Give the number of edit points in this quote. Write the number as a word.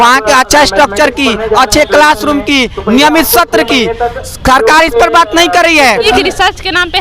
one